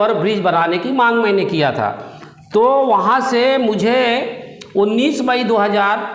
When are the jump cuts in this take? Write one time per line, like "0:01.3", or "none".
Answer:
none